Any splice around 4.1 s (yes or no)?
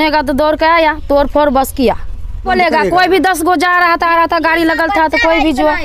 no